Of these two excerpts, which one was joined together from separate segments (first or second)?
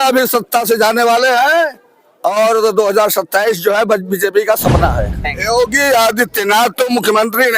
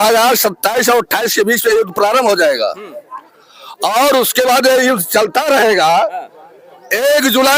first